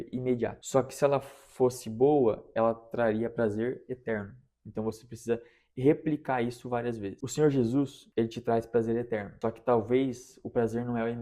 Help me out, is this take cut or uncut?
cut